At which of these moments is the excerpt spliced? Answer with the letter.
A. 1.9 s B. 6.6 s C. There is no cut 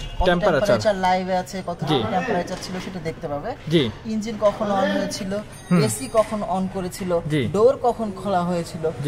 C